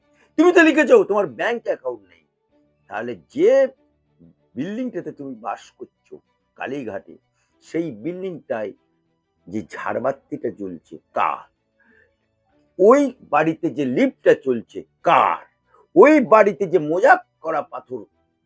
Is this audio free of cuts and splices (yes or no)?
yes